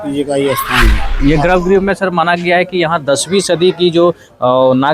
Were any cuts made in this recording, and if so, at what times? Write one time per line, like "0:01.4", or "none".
0:01.0